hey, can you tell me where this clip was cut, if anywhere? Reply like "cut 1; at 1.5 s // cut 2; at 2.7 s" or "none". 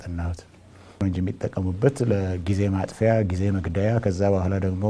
cut 1; at 1.0 s